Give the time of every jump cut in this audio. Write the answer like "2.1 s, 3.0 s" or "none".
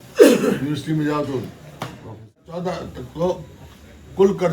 2.4 s